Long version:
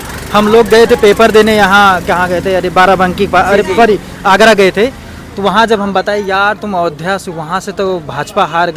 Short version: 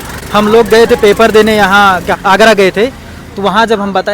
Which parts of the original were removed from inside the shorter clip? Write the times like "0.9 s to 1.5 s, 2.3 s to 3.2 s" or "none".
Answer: 2.1 s to 4.1 s